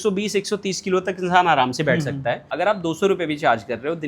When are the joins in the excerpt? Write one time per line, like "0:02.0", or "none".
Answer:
0:02.5